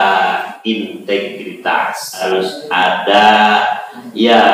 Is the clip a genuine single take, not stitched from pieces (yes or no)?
no